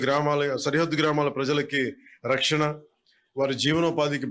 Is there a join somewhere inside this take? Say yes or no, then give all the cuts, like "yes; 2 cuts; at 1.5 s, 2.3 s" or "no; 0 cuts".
no; 0 cuts